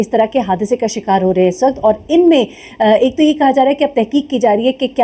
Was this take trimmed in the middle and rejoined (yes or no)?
no